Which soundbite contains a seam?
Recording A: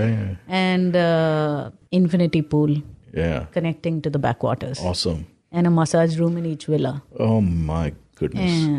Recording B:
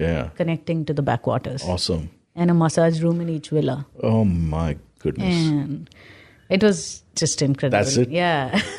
A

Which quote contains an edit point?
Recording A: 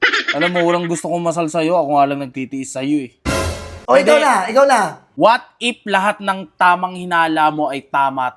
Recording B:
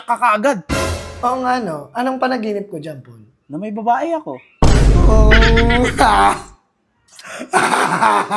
A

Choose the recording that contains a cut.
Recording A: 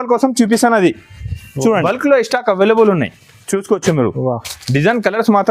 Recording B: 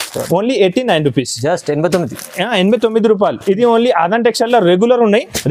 A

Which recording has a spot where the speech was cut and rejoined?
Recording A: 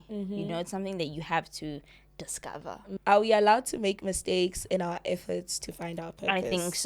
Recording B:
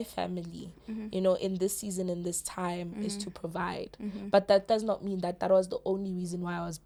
A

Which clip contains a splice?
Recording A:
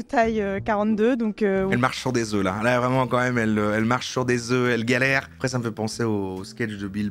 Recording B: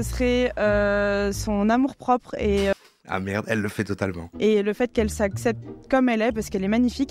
A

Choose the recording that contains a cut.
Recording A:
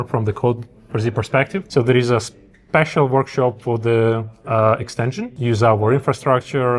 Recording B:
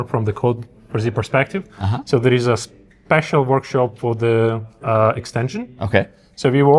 A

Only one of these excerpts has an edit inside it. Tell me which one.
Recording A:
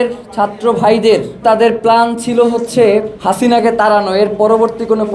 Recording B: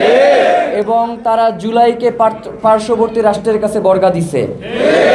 A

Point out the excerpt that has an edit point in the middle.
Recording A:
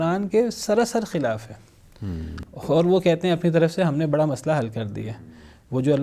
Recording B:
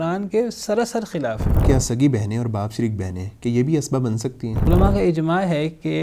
B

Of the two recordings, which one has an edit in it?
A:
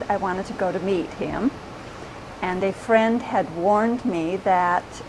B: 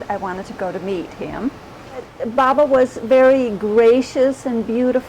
B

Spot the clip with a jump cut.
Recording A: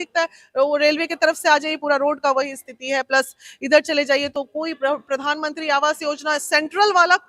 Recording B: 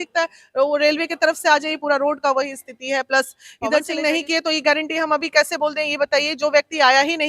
B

